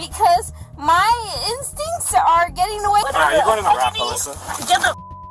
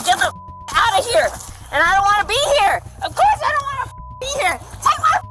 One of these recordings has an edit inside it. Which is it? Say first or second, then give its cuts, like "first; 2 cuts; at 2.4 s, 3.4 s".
first; 1 cut; at 3.1 s